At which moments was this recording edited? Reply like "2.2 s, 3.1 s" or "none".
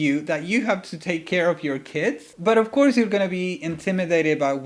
2.2 s

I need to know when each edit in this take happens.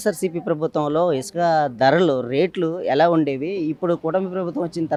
none

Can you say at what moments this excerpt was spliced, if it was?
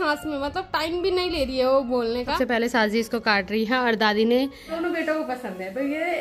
2.4 s, 4.7 s

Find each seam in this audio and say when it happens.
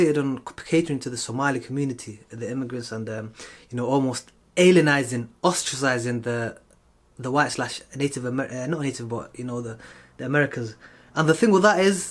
none

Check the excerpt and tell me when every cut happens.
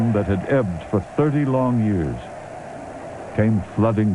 1.7 s

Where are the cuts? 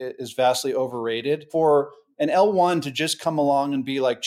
1.5 s

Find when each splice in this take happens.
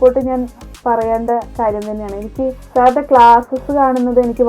2.6 s

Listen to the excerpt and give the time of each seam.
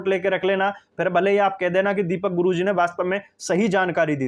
none

